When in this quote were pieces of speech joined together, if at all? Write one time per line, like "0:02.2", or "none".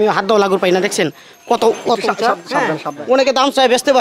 0:02.9

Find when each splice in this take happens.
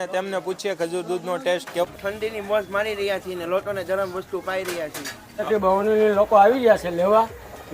0:01.8
0:05.5

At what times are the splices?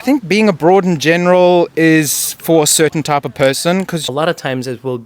0:04.1

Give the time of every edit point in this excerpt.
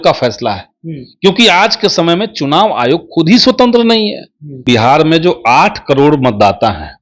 0:04.6

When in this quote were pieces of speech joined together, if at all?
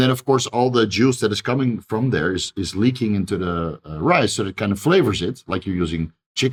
none

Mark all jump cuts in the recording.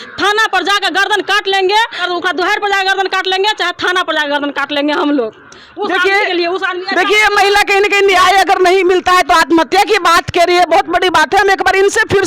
none

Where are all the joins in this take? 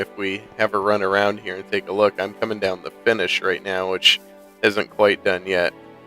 0:01.2

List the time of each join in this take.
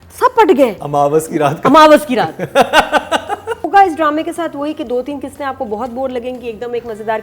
0:03.7

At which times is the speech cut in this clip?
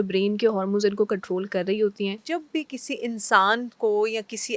0:02.2

